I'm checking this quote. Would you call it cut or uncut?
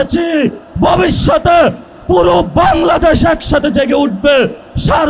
uncut